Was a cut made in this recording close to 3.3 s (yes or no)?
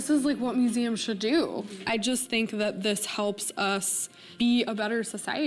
no